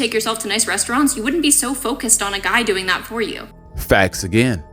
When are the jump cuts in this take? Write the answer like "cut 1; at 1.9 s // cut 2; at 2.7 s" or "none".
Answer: none